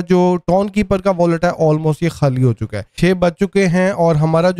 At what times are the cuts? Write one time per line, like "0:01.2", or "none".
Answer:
0:02.9